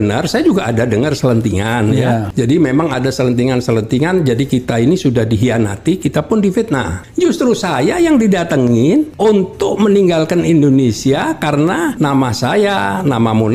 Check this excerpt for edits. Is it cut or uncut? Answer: cut